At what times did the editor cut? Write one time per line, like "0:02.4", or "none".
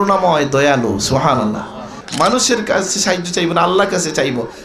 0:01.9